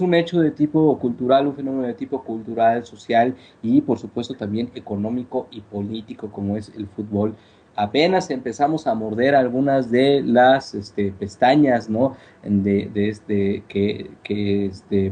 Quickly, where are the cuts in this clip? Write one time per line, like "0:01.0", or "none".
0:12.6